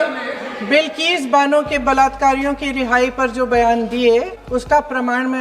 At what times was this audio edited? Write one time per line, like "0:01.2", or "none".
0:04.4